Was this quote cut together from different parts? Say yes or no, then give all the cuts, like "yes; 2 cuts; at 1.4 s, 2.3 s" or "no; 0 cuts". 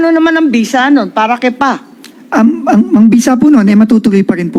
no; 0 cuts